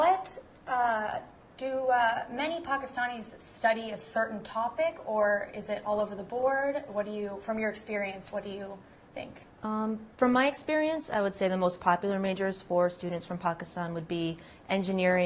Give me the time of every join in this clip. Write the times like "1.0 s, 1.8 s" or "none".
none

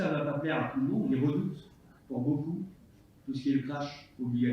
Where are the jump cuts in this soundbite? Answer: 1.1 s

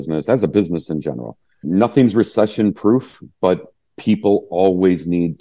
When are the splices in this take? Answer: 1.6 s

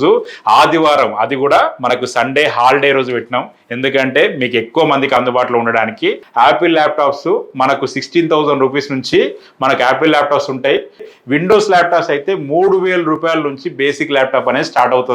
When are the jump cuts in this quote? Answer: 6.2 s, 11.1 s

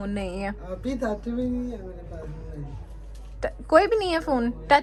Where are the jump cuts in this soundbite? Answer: none

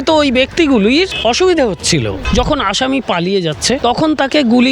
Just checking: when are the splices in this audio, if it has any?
1.1 s, 2.2 s, 3.8 s

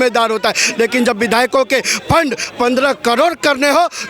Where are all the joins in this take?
2.4 s

